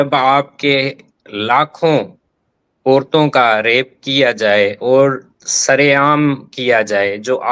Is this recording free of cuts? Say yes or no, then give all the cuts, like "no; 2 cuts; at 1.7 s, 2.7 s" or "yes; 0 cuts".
yes; 0 cuts